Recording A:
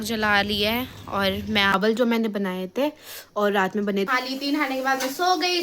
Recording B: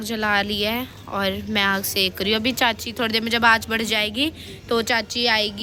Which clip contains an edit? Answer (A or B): A